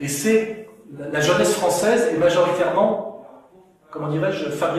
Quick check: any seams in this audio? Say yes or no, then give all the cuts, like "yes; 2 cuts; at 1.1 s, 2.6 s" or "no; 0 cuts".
no; 0 cuts